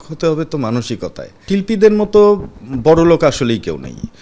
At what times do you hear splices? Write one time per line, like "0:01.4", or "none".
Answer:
0:01.4